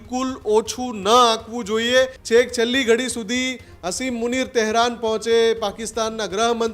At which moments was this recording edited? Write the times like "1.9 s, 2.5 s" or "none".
2.2 s